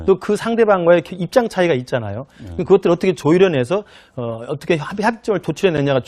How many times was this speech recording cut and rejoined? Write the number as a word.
zero